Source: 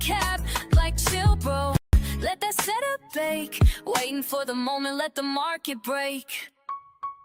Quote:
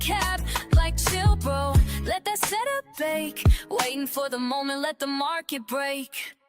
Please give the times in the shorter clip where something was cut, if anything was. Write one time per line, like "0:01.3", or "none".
0:01.8